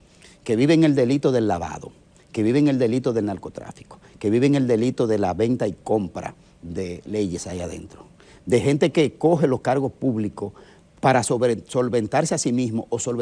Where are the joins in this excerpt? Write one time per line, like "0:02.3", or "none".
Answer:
none